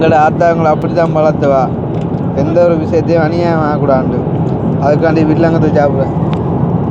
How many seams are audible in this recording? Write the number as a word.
zero